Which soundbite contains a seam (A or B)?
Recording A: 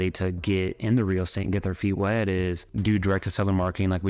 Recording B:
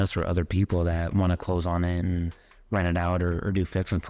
A